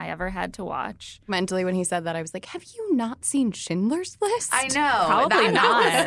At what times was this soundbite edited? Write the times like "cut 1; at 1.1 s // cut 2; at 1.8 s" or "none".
cut 1; at 1.3 s